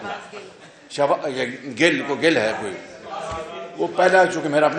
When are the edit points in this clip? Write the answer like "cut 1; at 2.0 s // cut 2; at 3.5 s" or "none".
none